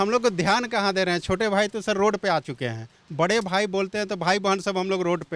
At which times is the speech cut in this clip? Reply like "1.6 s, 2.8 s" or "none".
none